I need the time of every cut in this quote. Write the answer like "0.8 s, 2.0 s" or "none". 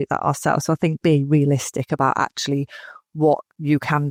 none